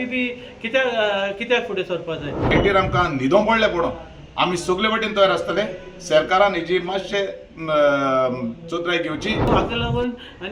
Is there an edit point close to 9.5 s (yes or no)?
yes